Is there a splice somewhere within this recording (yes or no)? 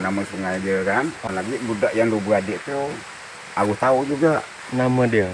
yes